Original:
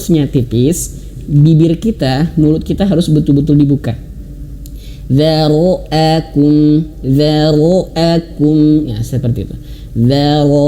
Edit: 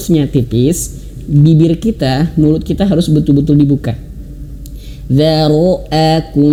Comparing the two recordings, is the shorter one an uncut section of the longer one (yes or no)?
yes